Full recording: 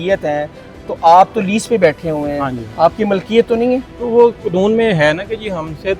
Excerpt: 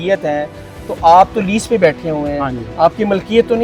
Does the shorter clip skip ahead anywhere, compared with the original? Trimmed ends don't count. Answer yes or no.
no